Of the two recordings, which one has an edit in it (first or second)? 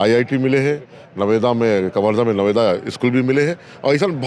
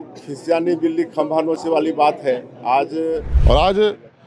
second